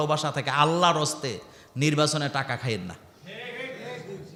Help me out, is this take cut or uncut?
uncut